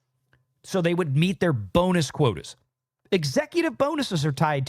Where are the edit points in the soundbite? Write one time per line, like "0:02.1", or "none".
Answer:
0:03.0